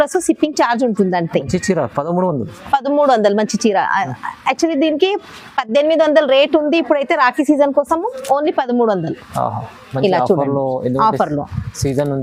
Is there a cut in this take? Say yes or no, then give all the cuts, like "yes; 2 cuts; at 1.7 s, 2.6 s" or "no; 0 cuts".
no; 0 cuts